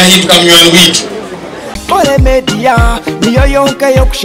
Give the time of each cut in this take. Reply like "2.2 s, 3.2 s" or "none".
1.8 s